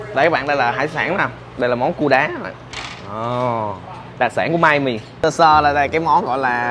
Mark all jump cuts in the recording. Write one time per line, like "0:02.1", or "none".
0:05.1

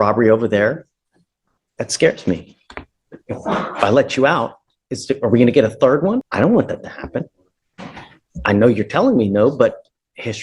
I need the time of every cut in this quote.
0:06.3

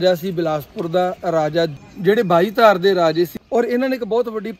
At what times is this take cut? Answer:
0:01.7
0:03.4

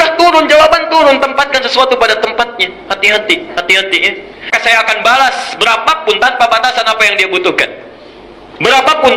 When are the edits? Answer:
0:04.5

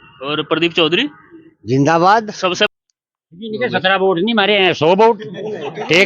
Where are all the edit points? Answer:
0:02.7

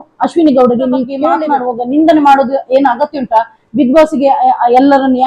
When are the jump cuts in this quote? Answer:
0:01.2

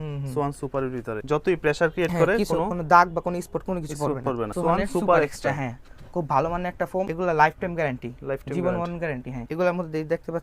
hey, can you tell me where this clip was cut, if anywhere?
0:01.2
0:04.5
0:07.1
0:09.4

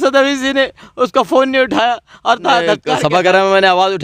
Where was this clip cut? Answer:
0:02.9

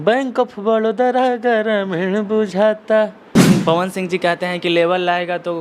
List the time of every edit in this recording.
0:03.4

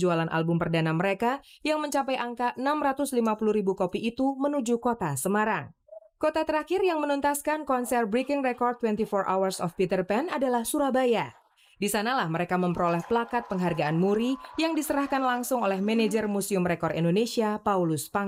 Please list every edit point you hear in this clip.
none

